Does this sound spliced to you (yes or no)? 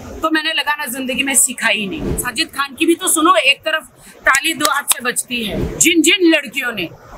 yes